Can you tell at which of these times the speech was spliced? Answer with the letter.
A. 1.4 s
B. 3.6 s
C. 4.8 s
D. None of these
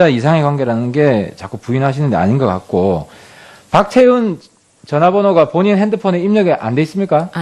D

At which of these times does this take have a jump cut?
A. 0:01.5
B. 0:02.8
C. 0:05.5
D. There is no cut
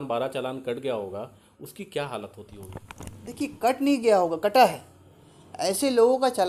D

